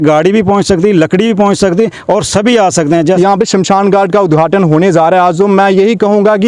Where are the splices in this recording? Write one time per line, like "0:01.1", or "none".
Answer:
0:03.2